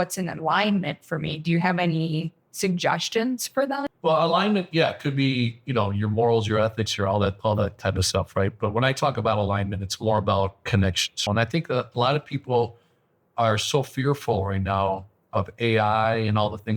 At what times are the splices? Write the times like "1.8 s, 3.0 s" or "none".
3.9 s, 11.1 s